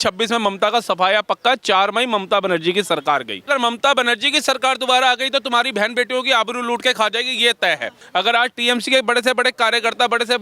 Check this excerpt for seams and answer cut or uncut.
cut